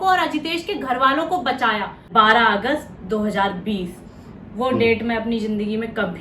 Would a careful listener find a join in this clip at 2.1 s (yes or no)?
yes